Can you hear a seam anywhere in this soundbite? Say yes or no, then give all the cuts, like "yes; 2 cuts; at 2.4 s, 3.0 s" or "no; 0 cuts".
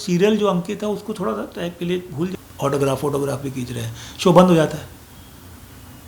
yes; 1 cut; at 2.3 s